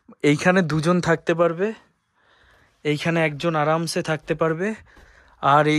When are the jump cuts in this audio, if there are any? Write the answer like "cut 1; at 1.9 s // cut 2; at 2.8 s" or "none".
none

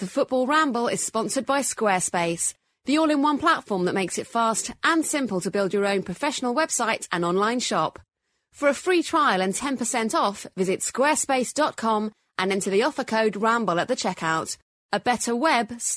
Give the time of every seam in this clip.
none

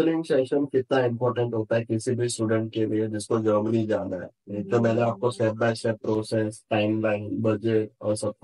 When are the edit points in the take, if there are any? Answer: none

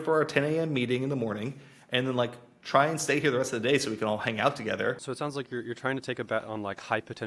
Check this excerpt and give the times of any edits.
cut 1; at 5.0 s

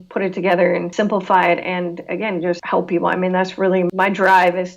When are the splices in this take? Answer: cut 1; at 0.9 s // cut 2; at 2.6 s // cut 3; at 3.9 s

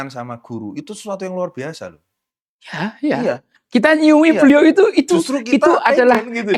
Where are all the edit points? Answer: none

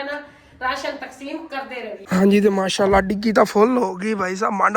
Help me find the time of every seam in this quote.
cut 1; at 2.0 s

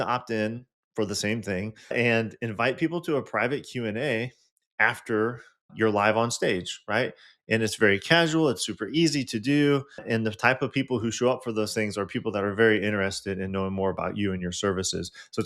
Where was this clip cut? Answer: cut 1; at 1.8 s

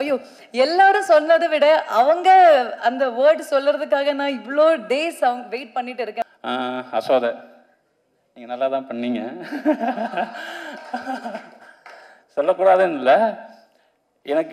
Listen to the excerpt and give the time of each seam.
cut 1; at 6.3 s

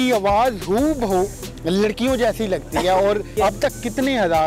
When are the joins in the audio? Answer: cut 1; at 3.3 s

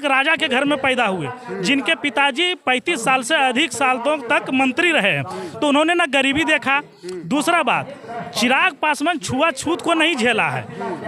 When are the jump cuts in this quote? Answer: none

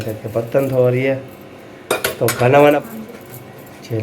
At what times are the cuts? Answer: cut 1; at 2.8 s

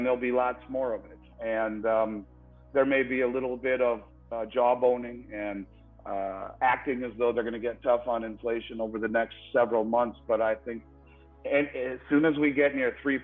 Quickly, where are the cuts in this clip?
none

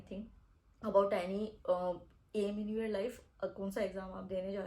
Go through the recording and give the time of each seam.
none

